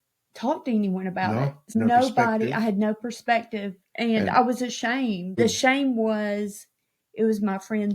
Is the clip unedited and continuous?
no; 2 cuts; at 1.8 s, 5.4 s

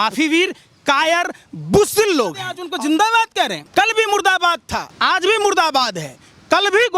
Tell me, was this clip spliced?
yes; 2 cuts; at 3.6 s, 4.9 s

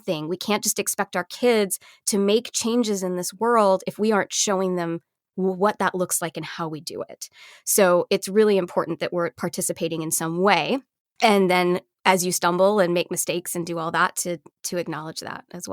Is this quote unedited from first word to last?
yes; 0 cuts

